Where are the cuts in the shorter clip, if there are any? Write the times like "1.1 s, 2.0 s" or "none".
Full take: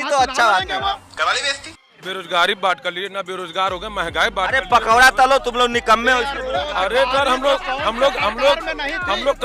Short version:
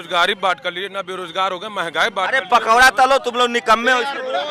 none